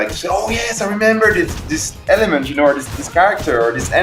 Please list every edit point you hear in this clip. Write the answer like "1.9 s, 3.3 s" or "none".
none